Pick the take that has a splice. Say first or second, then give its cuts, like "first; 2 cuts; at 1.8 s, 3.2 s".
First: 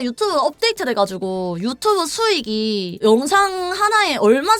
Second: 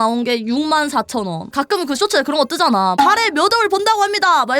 second; 1 cut; at 1.5 s